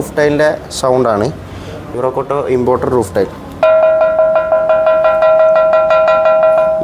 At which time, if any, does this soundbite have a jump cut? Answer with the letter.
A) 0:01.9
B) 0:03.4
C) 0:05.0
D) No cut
A